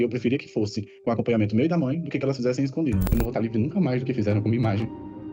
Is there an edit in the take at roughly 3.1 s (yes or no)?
yes